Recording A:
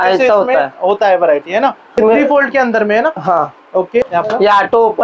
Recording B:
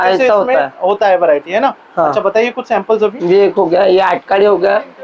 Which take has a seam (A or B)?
A